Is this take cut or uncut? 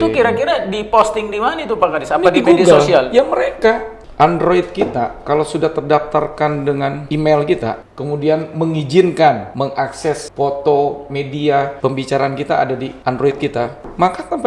cut